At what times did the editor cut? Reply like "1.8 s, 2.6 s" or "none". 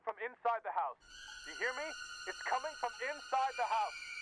none